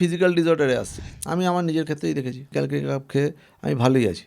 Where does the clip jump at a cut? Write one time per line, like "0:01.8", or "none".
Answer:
0:00.9
0:02.5